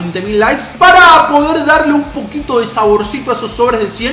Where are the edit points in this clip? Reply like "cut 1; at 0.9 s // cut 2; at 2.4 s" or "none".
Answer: none